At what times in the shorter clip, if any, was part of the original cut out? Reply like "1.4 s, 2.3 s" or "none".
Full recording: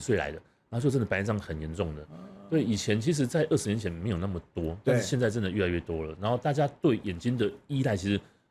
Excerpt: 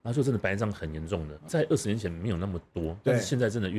1.5 s